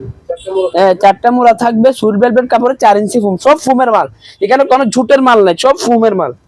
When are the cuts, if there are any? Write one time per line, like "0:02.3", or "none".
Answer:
none